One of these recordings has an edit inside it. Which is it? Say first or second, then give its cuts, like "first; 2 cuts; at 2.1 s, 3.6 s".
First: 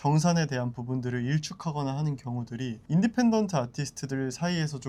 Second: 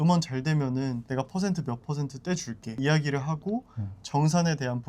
second; 2 cuts; at 1.0 s, 2.8 s